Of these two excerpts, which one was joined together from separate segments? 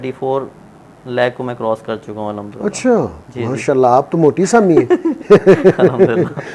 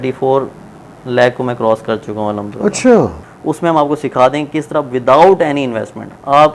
second; 1 cut; at 3.2 s

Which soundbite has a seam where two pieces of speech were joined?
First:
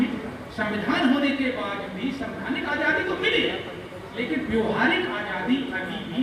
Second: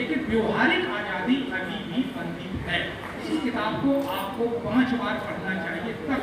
second; 1 cut; at 3.3 s

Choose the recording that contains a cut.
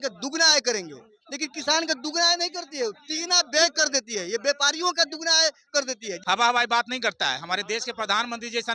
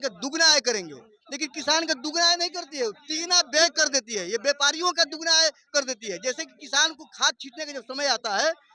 first; 1 cut; at 6.1 s

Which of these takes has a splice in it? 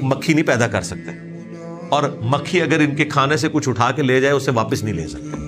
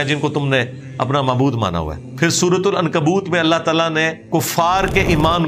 second; 2 cuts; at 2.0 s, 4.2 s

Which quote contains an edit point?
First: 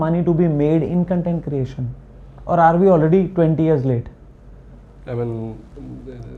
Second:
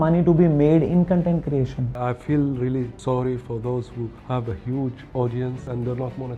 second; 4 cuts; at 1.9 s, 2.9 s, 4.2 s, 5.6 s

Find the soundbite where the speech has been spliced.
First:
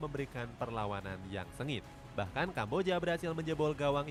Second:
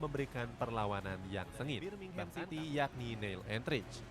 second; 1 cut; at 2.0 s

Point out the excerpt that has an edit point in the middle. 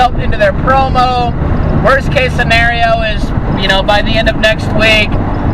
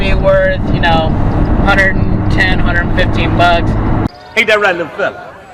second; 1 cut; at 4.2 s

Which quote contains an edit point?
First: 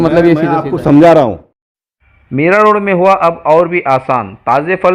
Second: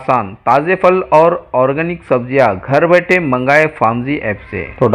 first; 1 cut; at 1.7 s

